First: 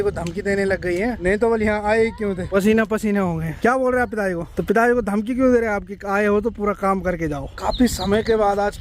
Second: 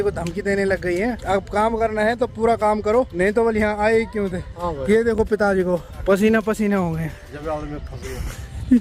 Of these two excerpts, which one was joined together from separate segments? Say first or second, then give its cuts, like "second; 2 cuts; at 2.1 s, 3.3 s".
first; 5 cuts; at 1.2 s, 2.4 s, 3.6 s, 4.5 s, 7.6 s